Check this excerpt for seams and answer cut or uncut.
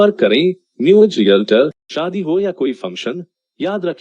cut